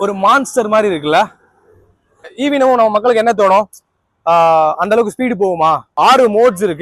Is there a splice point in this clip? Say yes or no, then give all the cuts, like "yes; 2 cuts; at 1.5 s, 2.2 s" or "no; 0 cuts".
yes; 2 cuts; at 2.3 s, 5.9 s